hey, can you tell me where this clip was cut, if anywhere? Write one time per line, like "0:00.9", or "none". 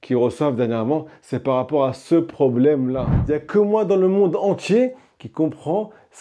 0:03.1